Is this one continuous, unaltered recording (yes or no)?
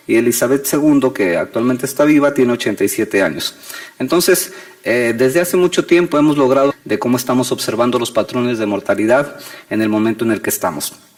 yes